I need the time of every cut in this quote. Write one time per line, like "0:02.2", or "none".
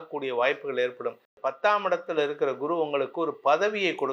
0:01.3

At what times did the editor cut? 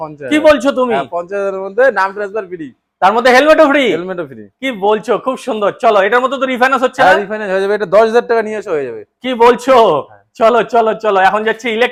none

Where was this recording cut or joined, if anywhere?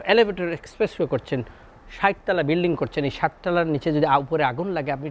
none

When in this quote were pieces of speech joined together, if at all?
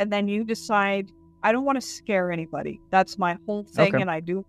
none

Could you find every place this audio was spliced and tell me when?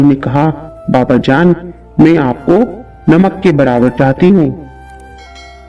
none

